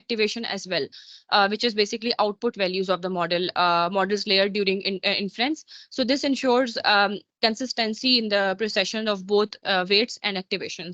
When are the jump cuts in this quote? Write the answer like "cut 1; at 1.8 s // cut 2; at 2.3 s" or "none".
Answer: none